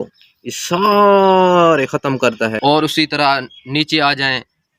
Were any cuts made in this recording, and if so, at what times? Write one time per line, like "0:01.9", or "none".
0:02.5